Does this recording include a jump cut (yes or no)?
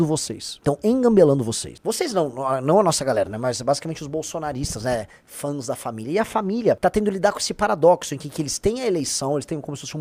no